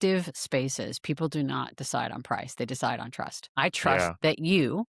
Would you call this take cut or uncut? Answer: cut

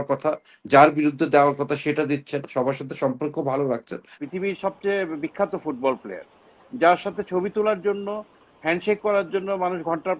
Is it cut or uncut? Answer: cut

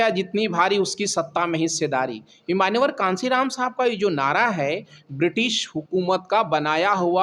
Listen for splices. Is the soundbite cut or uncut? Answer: uncut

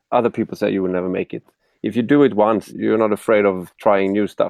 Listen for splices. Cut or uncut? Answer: cut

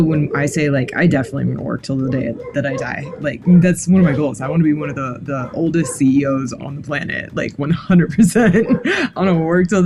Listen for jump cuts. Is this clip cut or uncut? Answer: uncut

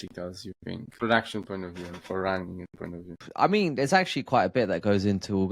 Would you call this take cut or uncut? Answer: cut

